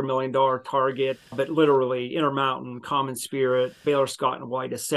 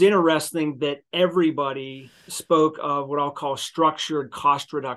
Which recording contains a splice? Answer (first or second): first